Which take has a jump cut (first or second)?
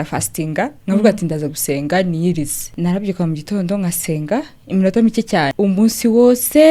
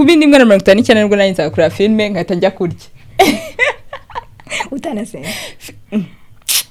first